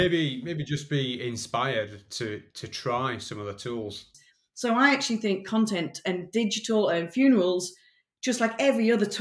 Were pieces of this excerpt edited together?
yes; 1 cut; at 4.1 s

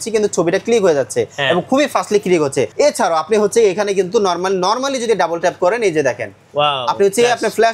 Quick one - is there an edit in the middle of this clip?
yes; 1 cut; at 2.7 s

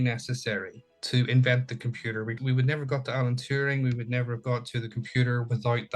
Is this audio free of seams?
no; 1 cut; at 2.3 s

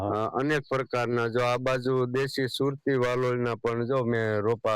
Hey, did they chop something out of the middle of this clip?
no; 0 cuts

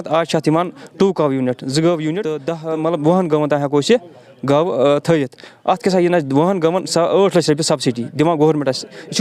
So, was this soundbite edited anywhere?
yes; 1 cut; at 2.5 s

